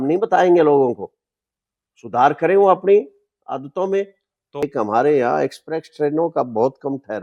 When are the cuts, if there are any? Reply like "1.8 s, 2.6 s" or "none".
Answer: 4.6 s